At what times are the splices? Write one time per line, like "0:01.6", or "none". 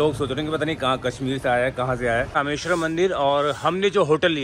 0:02.4

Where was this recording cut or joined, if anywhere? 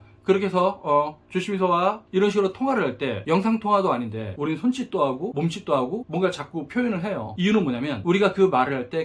0:02.0
0:03.1
0:04.3
0:07.3
0:08.0

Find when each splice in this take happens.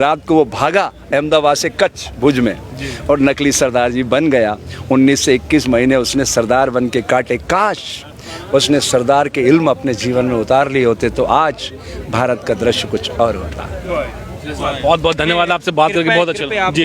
none

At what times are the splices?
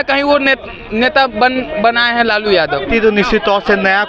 0:02.9

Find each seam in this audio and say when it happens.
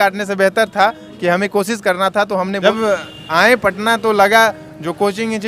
0:02.6

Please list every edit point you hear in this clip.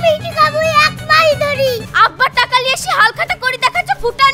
0:01.9

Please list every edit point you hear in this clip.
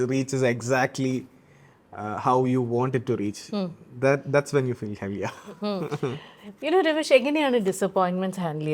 none

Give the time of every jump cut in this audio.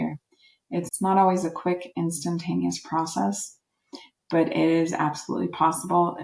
0:00.9

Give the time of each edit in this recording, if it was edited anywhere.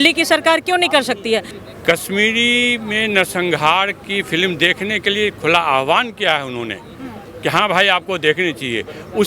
0:01.5

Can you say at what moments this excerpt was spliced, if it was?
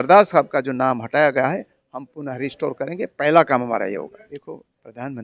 0:04.2

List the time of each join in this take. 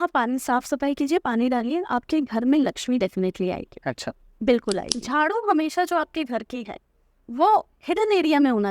0:05.0

